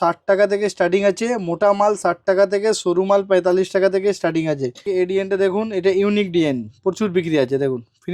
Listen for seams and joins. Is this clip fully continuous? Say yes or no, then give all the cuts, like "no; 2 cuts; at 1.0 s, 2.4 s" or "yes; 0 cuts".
no; 1 cut; at 4.8 s